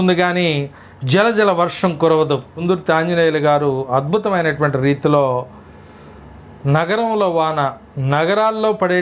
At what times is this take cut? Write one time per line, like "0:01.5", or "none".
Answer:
0:02.6